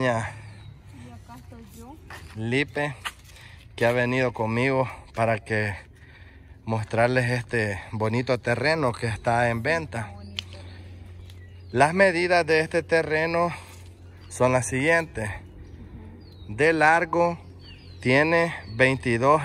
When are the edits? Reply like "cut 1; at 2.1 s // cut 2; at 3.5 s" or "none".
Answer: none